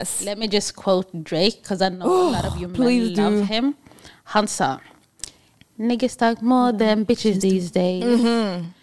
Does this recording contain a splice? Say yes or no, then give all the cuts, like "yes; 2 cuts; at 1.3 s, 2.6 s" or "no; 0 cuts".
no; 0 cuts